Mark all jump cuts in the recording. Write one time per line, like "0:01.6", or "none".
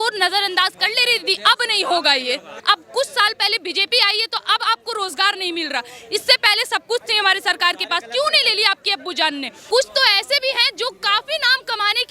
0:02.5
0:09.6